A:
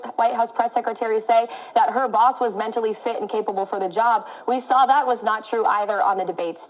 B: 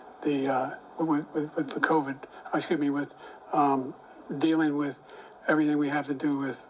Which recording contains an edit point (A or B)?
A